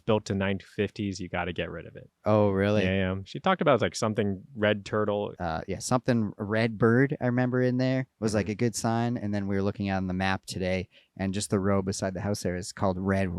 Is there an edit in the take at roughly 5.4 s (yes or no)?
yes